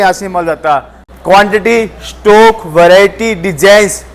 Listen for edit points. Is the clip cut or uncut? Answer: uncut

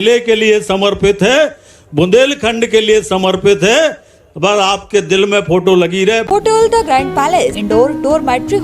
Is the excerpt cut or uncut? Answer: cut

